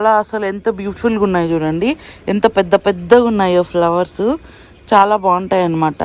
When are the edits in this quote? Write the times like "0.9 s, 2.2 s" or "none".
none